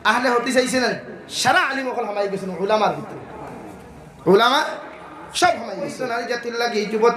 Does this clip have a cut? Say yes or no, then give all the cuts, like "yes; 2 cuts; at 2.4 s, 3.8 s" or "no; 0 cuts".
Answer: yes; 1 cut; at 6.1 s